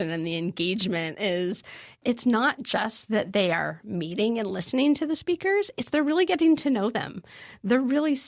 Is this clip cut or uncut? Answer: cut